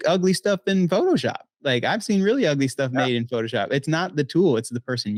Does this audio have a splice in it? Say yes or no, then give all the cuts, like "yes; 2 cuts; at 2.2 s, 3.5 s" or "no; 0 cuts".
no; 0 cuts